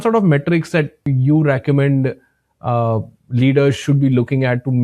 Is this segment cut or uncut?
cut